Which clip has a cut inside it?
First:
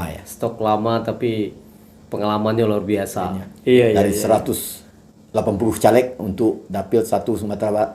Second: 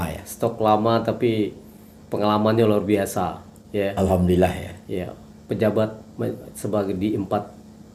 first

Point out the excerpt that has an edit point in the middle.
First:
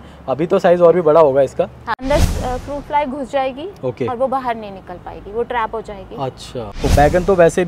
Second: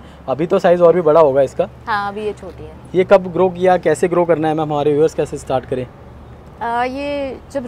first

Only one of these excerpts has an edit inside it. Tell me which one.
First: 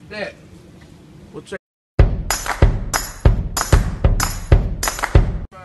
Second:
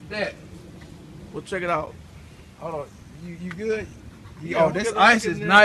second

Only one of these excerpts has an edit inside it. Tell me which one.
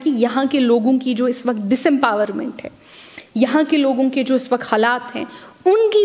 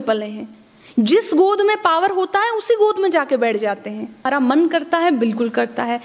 second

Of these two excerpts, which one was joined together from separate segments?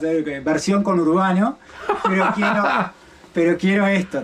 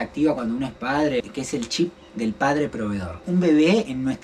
second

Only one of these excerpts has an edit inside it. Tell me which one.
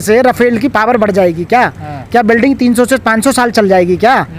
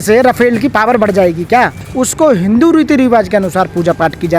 second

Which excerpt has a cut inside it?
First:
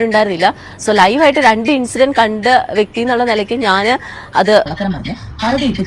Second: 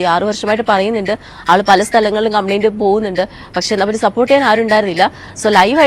first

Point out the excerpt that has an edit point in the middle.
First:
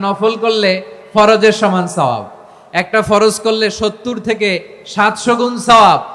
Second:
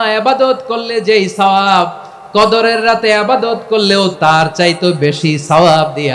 second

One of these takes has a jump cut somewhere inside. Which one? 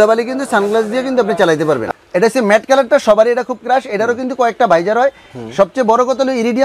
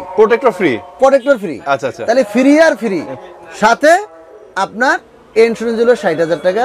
first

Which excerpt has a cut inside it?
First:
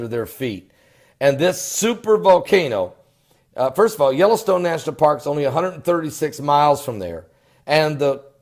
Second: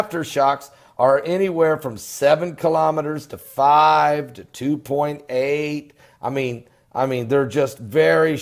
first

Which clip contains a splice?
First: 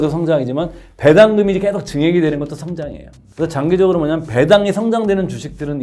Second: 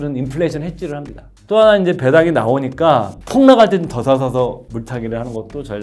second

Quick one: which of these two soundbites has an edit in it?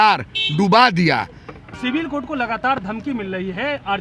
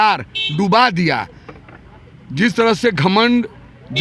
first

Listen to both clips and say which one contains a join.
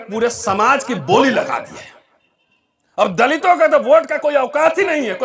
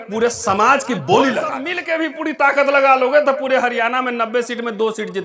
second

